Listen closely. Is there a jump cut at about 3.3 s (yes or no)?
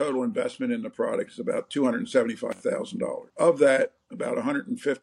yes